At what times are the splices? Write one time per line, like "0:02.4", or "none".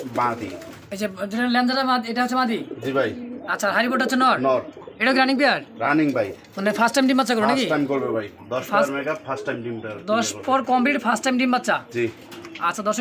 none

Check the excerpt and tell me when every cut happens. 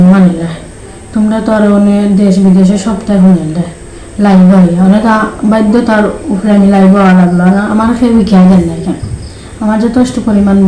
none

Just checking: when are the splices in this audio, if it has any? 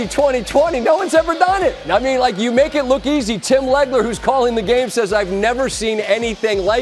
none

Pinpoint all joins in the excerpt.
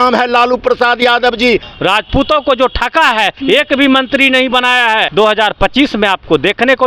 0:01.7
0:05.1

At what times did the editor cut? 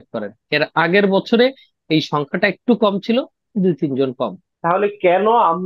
0:04.5

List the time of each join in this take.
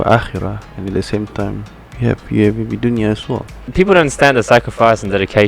0:03.7

